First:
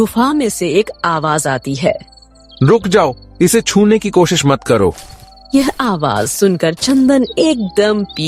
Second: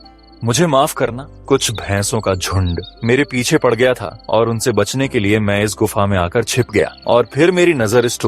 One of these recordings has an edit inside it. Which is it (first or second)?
second